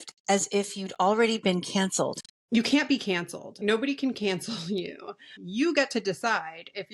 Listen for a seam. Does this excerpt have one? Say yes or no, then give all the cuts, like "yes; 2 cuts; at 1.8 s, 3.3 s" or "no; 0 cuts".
yes; 3 cuts; at 2.3 s, 3.6 s, 5.4 s